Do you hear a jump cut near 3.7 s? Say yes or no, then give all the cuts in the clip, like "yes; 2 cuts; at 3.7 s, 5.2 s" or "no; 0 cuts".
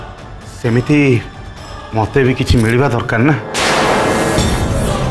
no; 0 cuts